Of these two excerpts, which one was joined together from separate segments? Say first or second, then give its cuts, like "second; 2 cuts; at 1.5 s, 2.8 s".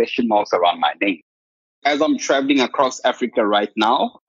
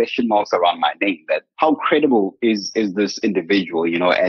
first; 1 cut; at 1.6 s